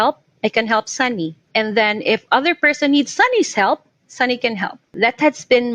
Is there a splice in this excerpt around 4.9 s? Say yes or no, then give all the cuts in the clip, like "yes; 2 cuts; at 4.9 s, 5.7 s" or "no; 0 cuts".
yes; 2 cuts; at 1.4 s, 4.9 s